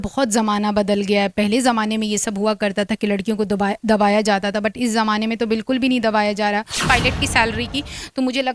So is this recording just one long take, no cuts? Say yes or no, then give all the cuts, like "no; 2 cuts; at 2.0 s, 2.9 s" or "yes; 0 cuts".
no; 1 cut; at 6.8 s